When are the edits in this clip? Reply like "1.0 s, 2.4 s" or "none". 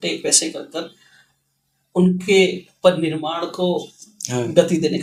none